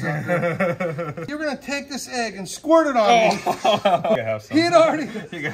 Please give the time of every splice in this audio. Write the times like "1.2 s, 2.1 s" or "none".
1.2 s, 4.2 s